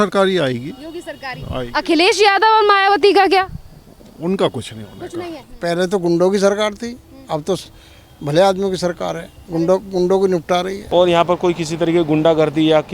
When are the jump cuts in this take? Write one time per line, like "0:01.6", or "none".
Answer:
0:05.4
0:10.8